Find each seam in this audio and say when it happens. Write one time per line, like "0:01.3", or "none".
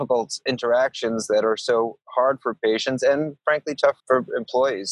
0:04.0